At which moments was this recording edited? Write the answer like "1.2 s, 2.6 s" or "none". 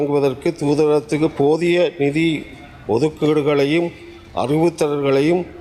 none